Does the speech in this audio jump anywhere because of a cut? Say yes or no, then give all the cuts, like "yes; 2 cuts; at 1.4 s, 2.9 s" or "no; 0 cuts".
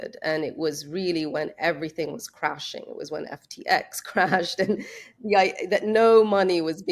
no; 0 cuts